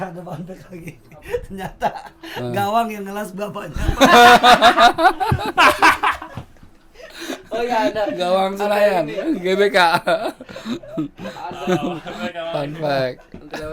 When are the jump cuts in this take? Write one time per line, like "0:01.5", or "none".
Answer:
none